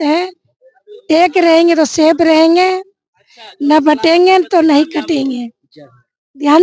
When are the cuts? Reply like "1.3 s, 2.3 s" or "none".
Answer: none